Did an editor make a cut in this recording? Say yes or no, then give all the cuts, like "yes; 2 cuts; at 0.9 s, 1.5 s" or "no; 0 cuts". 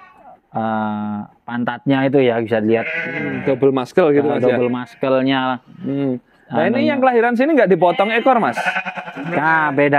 no; 0 cuts